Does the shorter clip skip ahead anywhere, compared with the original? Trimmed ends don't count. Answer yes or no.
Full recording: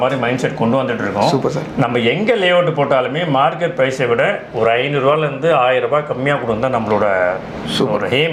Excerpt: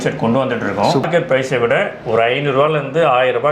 yes